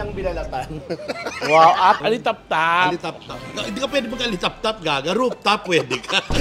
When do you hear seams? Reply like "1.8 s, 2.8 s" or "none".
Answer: 2.0 s

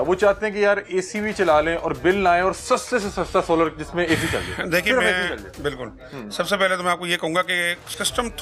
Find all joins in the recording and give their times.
none

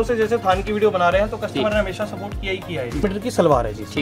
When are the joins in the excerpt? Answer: 3.0 s

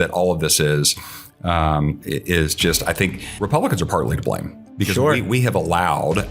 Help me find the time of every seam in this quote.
3.2 s

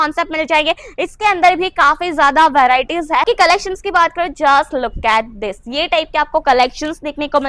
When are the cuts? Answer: 3.2 s

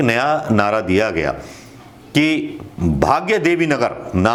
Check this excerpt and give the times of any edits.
none

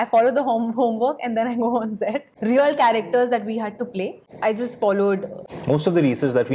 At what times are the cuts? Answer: 2.3 s, 4.2 s, 5.4 s

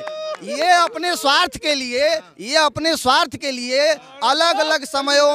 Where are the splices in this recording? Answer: none

